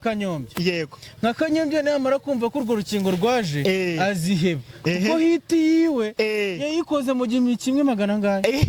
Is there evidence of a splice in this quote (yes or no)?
no